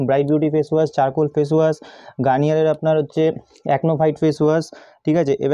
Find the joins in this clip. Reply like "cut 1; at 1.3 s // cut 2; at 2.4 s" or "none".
none